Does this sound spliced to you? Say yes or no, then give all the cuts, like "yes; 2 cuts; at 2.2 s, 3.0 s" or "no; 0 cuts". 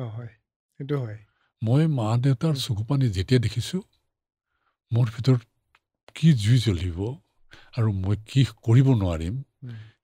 no; 0 cuts